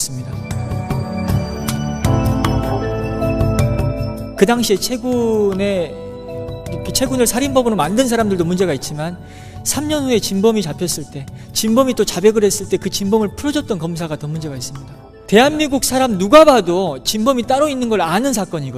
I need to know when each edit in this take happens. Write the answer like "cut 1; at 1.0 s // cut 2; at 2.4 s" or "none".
cut 1; at 5.3 s